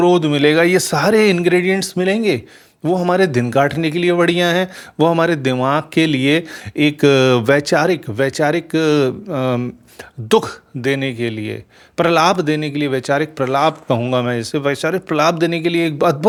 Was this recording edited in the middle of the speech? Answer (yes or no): no